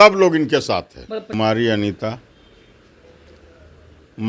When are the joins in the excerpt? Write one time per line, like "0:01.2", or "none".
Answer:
0:01.3